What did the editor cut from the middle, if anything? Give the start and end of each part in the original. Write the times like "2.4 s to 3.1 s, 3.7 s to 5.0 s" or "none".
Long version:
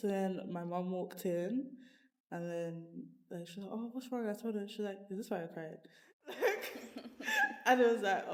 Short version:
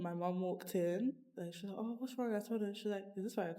1.8 s to 3.2 s